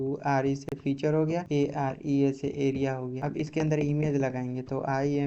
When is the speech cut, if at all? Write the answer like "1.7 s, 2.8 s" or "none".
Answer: 1.4 s, 3.1 s

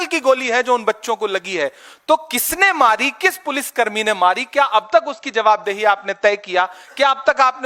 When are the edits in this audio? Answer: none

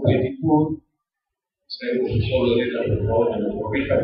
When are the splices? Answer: 2.7 s

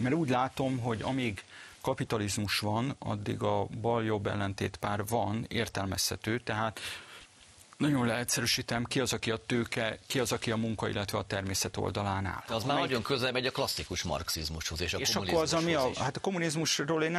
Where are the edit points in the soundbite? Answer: 12.4 s

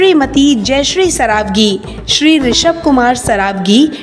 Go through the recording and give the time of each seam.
none

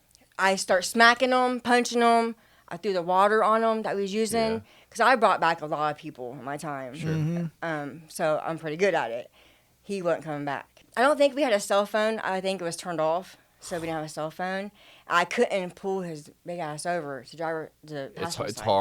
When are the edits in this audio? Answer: 10.8 s

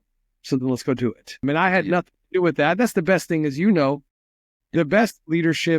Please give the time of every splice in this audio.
1.4 s

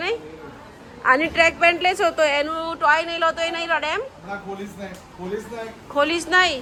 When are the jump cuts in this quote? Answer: none

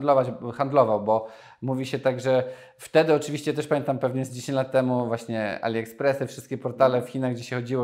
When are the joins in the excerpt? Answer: none

